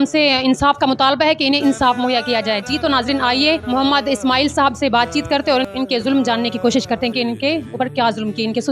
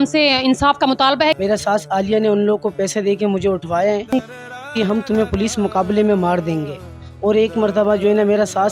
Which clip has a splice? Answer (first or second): second